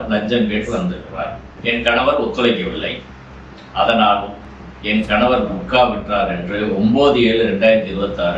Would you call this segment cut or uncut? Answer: cut